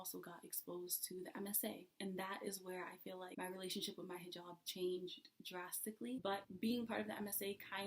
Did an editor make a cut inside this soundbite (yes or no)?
yes